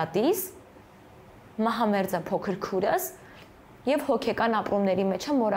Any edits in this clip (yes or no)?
no